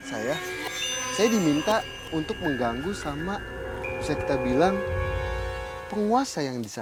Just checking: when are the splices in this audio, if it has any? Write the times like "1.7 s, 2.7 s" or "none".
none